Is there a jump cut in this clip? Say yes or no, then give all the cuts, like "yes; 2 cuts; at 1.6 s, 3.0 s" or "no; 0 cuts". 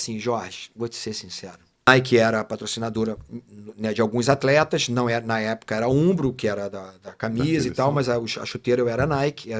yes; 1 cut; at 1.9 s